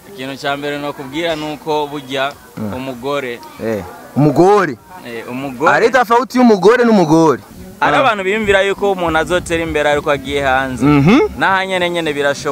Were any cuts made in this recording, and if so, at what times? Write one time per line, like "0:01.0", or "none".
0:07.6